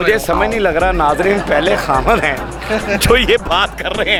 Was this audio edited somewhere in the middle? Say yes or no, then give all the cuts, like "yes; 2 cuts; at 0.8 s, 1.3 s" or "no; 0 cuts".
no; 0 cuts